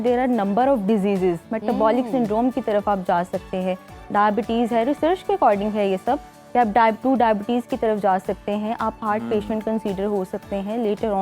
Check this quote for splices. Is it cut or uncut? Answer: uncut